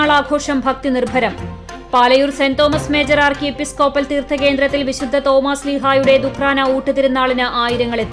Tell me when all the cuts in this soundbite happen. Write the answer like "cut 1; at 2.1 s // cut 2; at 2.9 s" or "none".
none

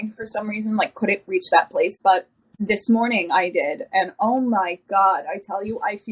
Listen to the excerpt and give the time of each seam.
cut 1; at 1.9 s

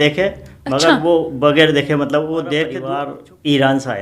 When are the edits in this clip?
cut 1; at 2.8 s

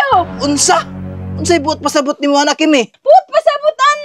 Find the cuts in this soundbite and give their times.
cut 1; at 2.9 s

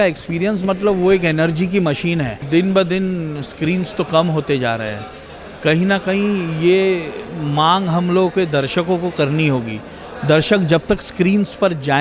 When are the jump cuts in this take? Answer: cut 1; at 2.4 s

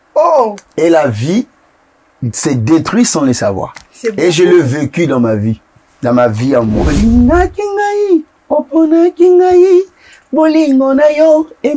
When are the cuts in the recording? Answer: cut 1; at 6.9 s

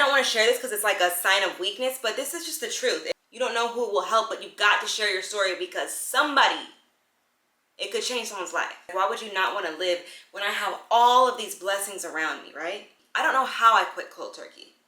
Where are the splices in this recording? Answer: cut 1; at 3.2 s // cut 2; at 8.9 s // cut 3; at 13.0 s

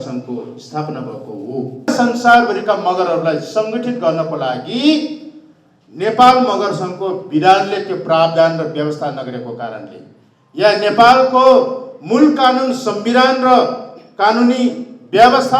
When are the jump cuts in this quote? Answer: cut 1; at 1.9 s

